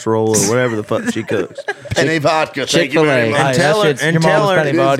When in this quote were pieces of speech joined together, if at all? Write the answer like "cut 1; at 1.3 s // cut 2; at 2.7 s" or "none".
none